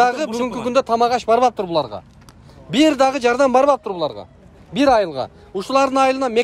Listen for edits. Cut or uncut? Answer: uncut